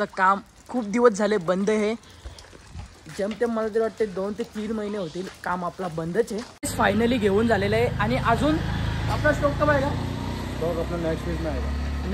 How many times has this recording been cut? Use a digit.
1